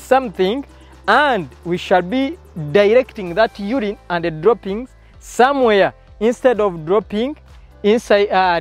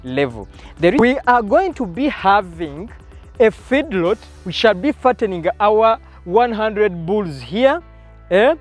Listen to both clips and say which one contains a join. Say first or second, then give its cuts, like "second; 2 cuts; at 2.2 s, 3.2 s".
second; 1 cut; at 1.0 s